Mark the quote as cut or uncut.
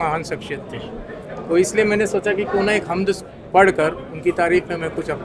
uncut